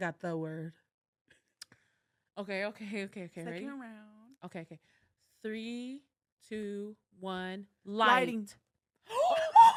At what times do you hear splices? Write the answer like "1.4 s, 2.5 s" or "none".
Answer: none